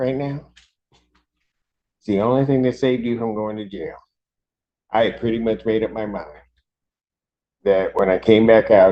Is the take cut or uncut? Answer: uncut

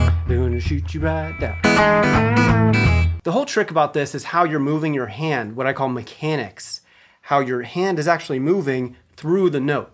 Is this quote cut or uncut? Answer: cut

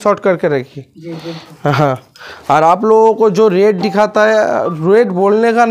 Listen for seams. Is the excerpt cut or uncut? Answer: uncut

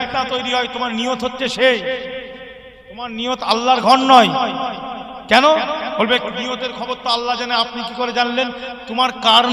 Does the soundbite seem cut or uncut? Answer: uncut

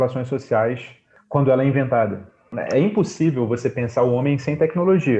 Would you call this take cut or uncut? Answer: cut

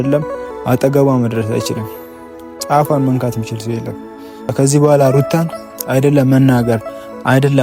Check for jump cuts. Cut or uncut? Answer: uncut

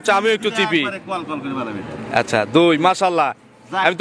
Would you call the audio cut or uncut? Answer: uncut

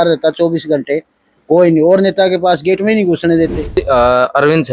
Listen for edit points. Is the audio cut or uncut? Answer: cut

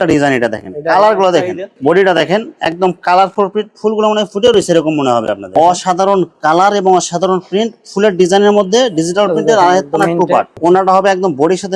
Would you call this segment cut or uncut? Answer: cut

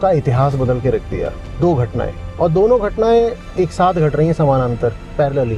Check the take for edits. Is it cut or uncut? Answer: uncut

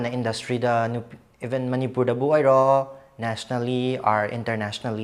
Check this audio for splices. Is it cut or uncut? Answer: uncut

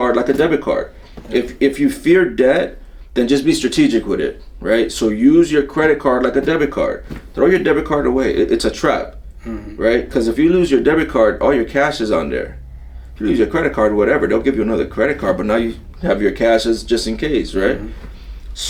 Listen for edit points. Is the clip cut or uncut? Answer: uncut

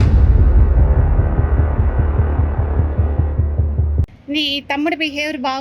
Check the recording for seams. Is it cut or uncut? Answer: cut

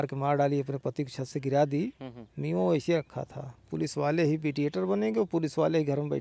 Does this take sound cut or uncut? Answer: uncut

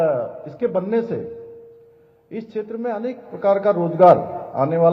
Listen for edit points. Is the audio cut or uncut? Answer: uncut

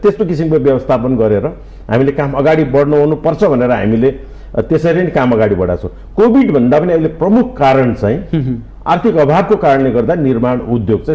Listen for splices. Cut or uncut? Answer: uncut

